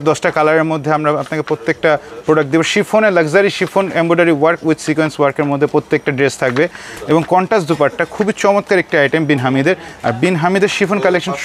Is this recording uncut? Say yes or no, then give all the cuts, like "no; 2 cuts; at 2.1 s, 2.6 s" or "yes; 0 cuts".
yes; 0 cuts